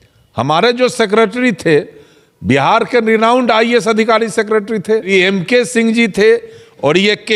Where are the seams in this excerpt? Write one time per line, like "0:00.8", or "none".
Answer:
0:05.1

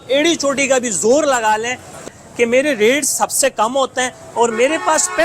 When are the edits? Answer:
0:02.0

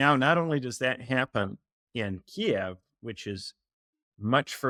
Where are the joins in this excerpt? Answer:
none

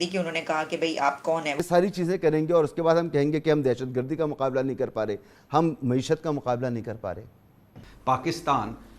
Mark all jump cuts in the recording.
0:01.6

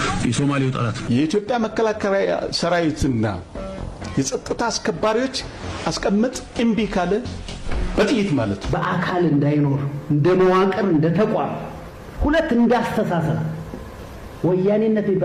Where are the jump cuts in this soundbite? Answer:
none

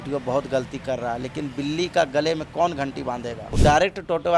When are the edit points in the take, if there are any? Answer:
0:03.4

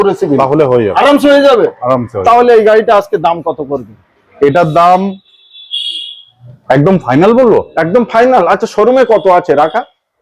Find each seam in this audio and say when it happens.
none

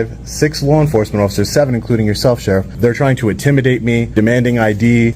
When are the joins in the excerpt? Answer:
0:02.7
0:04.1

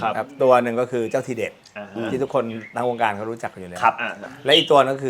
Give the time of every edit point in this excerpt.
0:04.1

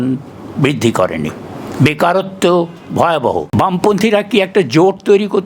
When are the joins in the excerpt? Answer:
0:03.6

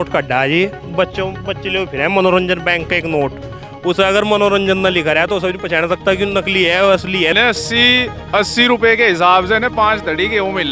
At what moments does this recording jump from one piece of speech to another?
0:07.3

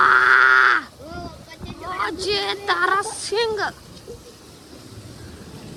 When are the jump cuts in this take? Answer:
none

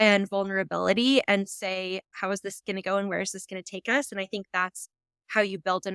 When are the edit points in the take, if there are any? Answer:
0:02.1

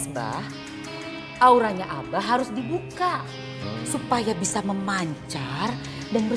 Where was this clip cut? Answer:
none

